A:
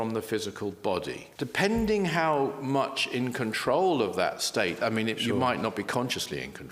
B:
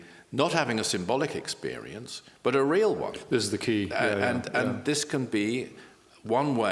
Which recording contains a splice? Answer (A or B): A